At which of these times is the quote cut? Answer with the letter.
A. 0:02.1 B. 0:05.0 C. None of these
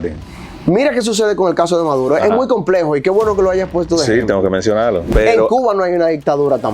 B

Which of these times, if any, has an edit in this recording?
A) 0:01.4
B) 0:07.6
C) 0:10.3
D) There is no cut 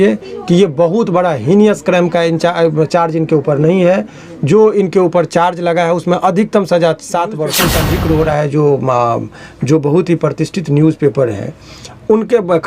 B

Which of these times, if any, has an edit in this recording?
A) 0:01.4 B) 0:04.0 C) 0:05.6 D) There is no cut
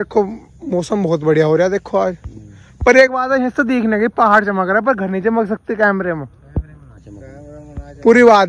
D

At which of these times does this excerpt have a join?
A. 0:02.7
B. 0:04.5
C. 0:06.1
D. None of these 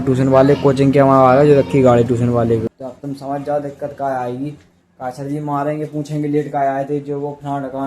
A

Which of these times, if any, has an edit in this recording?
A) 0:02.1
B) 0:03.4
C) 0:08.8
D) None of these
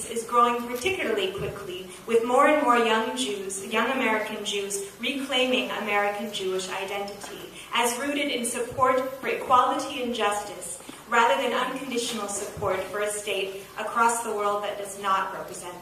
B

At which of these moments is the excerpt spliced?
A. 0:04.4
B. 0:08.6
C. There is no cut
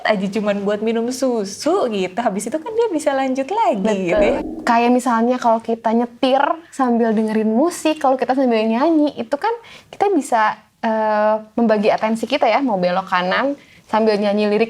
A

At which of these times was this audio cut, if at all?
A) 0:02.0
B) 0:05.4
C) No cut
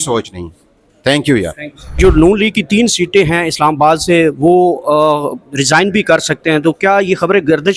A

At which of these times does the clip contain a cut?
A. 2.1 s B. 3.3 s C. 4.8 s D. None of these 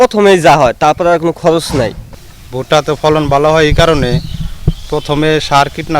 A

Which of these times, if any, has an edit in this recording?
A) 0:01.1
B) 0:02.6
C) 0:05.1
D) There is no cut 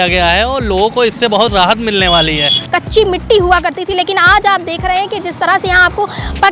B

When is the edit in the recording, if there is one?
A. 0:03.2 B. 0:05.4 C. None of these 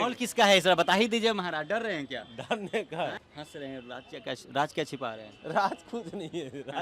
A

